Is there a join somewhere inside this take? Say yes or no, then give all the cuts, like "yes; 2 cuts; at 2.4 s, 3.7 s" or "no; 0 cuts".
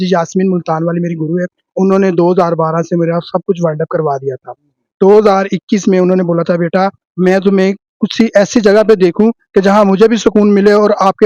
no; 0 cuts